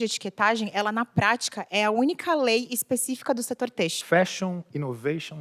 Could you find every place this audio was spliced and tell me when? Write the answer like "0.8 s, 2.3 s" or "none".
4.0 s

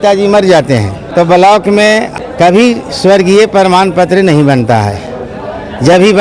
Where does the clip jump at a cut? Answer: 1.0 s, 2.1 s

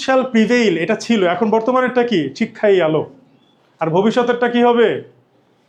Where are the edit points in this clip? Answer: none

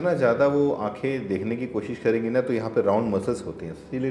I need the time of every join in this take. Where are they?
none

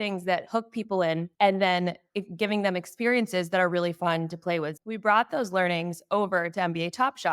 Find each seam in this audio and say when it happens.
4.7 s

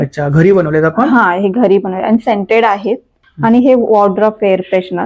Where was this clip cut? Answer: none

